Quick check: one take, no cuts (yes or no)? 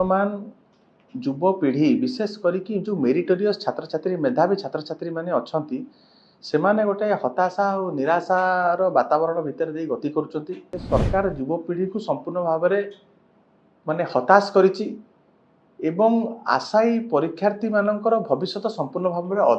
no